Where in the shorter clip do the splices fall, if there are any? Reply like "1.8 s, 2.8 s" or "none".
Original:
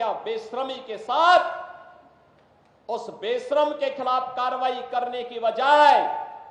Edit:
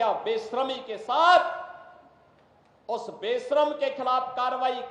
none

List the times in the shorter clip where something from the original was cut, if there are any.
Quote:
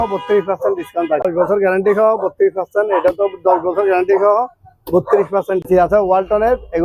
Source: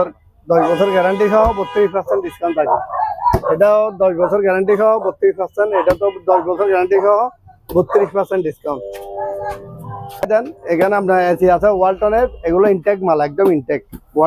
1.2 s, 5.7 s

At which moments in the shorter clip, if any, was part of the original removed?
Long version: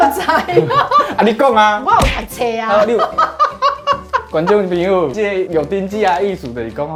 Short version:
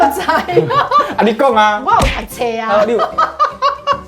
none

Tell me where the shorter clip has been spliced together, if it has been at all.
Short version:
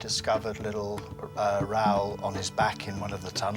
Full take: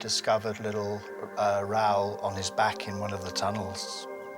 none

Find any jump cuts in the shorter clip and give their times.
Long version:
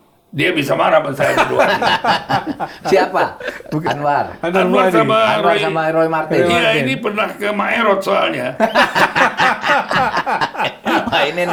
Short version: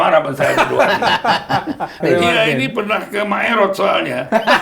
2.0 s

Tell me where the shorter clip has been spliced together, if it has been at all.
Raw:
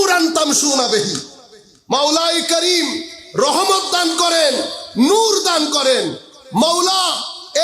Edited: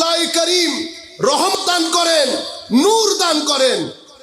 1.5 s

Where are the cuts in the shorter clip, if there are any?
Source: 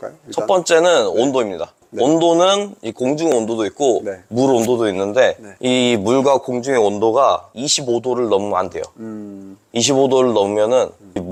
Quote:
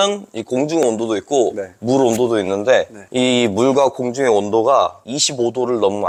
none

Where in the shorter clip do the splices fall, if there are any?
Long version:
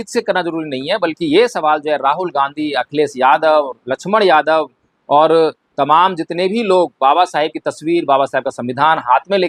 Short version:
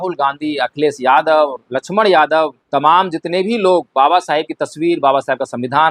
2.6 s

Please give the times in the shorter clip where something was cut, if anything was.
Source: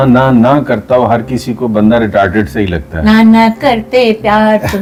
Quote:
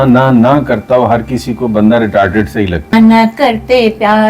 2.9 s

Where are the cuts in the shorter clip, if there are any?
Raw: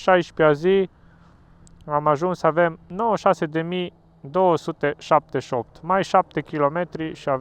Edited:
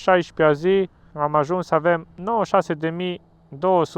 1.0 s

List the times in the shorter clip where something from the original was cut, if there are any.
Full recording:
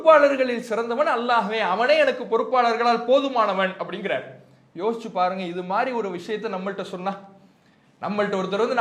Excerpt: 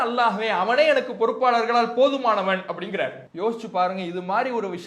3.2 s

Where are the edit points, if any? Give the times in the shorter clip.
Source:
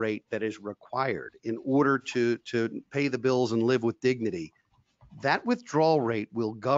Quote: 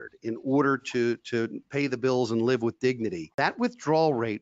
3.2 s

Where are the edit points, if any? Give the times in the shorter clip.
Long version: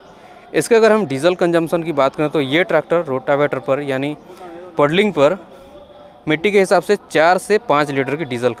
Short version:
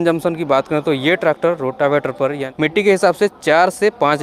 2.4 s

